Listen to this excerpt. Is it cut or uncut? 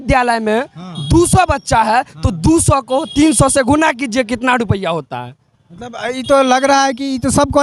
uncut